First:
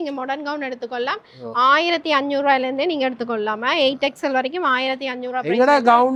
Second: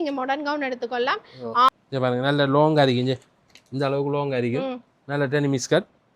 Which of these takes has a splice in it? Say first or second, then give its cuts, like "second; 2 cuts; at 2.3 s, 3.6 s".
second; 1 cut; at 1.7 s